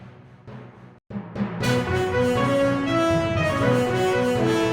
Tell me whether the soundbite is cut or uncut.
uncut